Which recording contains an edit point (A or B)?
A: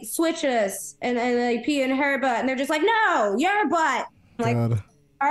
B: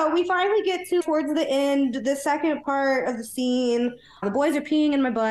B